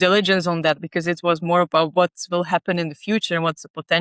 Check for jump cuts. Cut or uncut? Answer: uncut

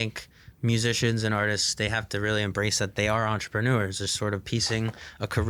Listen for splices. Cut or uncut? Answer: uncut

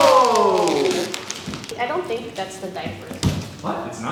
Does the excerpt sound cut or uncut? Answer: uncut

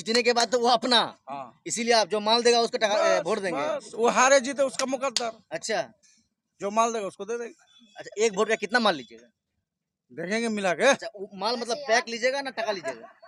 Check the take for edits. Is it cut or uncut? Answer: uncut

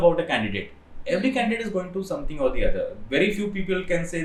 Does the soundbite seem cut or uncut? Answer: uncut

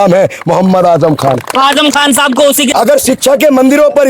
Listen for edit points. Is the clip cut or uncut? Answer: cut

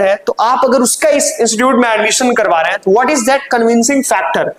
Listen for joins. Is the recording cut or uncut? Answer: uncut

